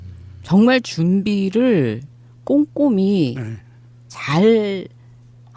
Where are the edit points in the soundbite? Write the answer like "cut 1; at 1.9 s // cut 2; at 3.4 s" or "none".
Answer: cut 1; at 4.1 s